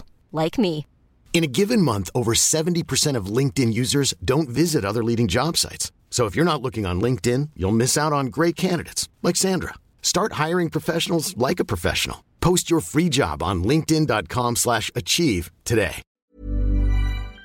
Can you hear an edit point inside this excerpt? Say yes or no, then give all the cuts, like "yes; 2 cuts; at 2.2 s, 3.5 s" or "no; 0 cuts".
yes; 1 cut; at 16.1 s